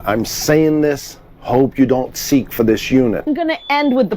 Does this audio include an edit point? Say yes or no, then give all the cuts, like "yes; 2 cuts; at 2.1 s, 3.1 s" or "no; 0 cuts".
yes; 1 cut; at 3.3 s